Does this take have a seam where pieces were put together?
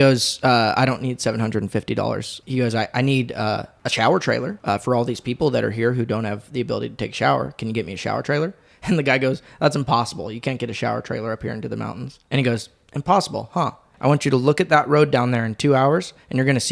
yes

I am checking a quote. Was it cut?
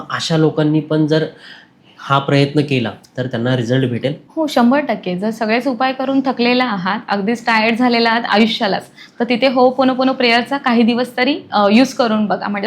no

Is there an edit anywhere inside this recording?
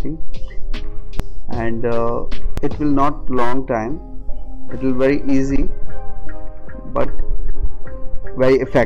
yes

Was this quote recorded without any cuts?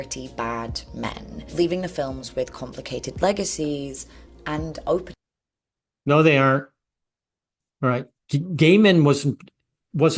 yes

